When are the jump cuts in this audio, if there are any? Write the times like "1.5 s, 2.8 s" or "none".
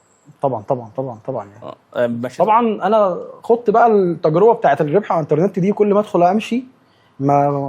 2.2 s